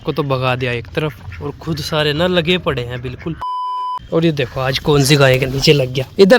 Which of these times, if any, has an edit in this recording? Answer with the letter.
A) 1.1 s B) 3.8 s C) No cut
B